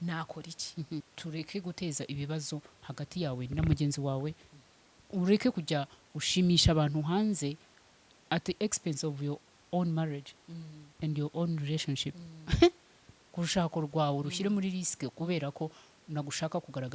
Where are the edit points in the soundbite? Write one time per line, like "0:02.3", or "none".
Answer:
0:01.1